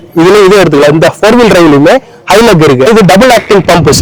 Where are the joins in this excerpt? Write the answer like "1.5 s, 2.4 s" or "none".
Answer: 2.9 s